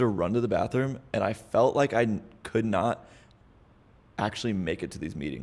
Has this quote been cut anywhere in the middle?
no; 0 cuts

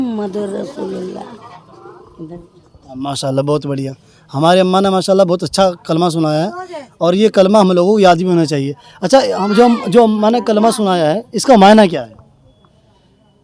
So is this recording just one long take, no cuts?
yes; 0 cuts

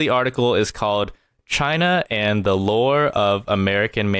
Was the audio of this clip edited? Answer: no; 0 cuts

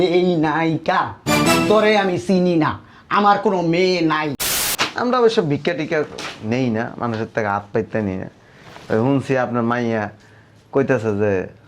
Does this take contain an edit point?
yes; 1 cut; at 4.5 s

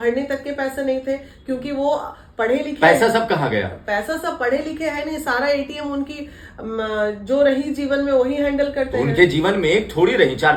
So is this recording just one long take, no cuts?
yes; 0 cuts

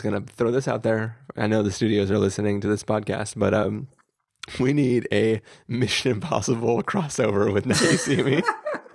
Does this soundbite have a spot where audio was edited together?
no; 0 cuts

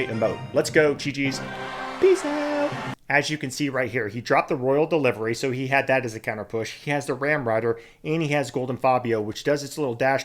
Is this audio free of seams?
no; 1 cut; at 2.9 s

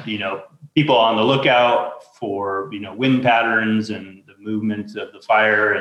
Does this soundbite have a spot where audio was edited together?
no; 0 cuts

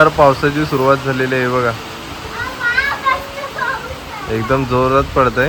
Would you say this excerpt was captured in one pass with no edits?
yes; 0 cuts

